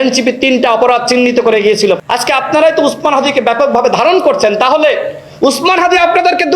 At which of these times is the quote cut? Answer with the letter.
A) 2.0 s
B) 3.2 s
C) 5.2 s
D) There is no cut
A